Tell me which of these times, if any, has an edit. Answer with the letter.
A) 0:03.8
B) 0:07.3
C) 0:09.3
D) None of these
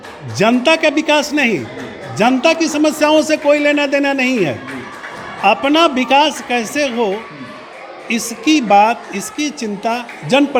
D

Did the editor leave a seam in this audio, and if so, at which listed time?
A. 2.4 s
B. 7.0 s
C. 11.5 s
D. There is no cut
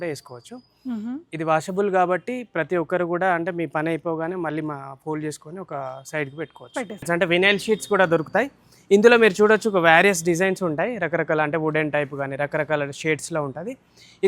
B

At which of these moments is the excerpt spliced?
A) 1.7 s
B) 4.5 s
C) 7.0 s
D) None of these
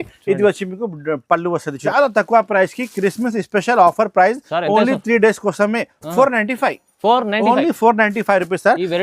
A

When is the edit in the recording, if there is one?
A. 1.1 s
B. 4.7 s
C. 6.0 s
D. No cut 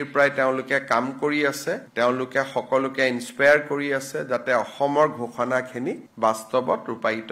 D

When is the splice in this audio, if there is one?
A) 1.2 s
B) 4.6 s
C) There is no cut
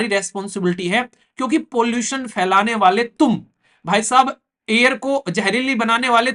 C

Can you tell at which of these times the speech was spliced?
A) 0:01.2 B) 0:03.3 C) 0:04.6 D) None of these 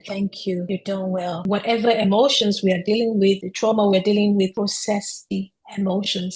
A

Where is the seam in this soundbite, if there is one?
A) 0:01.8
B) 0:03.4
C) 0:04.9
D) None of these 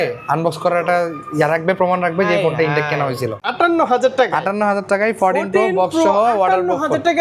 B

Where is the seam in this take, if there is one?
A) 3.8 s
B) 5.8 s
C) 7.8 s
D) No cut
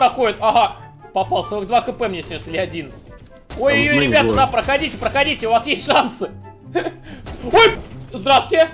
C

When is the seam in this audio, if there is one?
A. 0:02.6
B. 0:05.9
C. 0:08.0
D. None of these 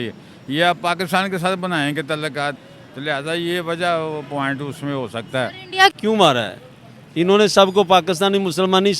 B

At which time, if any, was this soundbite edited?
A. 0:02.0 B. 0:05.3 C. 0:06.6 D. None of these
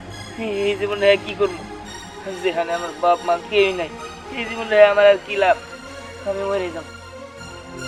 D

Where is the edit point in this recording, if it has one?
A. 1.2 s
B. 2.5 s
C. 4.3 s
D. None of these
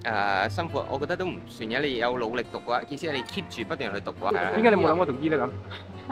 C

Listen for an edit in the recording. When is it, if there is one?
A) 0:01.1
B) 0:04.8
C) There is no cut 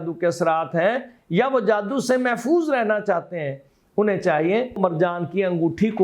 B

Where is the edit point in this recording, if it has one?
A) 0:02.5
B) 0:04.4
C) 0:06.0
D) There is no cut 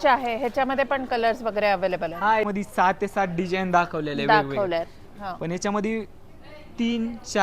A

